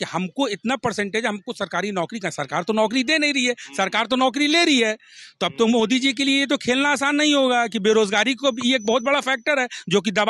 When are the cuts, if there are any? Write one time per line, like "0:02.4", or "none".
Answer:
none